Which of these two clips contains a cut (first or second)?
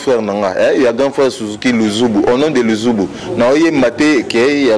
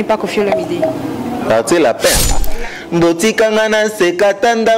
second